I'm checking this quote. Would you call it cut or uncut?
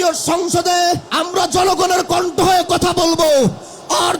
cut